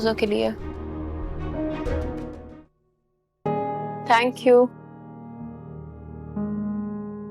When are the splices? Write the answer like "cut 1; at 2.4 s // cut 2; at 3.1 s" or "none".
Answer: cut 1; at 2.4 s